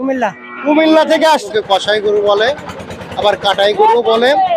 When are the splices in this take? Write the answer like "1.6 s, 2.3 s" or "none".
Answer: 1.5 s